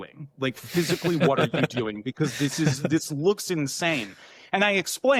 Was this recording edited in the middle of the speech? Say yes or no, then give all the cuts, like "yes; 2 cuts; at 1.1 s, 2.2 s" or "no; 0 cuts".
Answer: no; 0 cuts